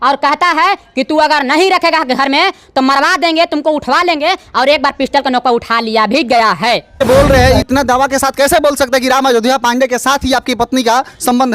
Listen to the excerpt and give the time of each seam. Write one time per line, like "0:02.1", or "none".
0:07.0